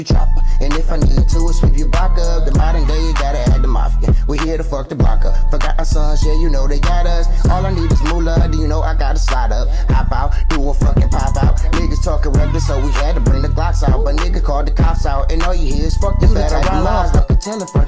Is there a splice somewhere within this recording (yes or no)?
yes